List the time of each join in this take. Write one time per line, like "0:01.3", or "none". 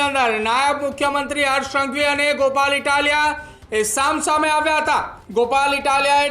0:05.2